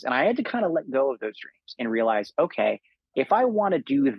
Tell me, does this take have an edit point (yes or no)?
no